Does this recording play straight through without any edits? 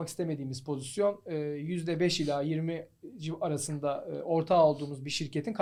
yes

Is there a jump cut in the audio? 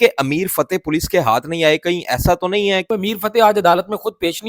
yes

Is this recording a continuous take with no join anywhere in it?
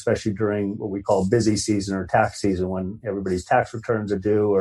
yes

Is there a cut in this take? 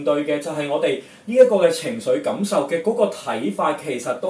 no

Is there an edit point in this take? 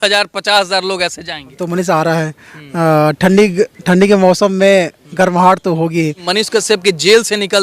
yes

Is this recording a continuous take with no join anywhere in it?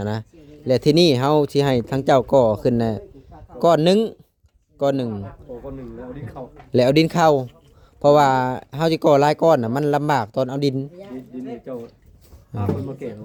yes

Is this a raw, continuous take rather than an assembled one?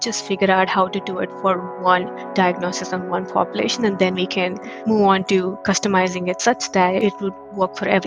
no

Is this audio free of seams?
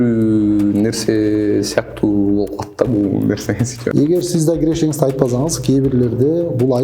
no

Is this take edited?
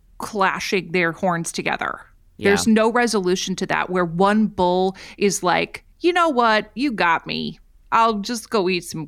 no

